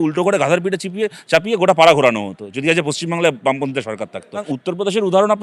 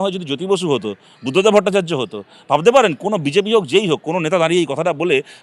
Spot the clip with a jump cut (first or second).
first